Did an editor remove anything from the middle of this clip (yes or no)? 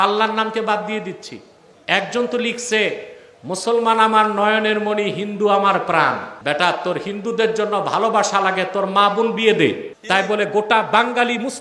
yes